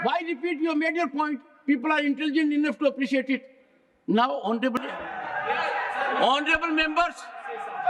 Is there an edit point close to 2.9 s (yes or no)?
no